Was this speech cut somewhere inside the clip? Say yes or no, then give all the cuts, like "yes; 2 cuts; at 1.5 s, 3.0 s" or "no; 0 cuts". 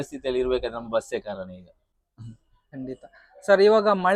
no; 0 cuts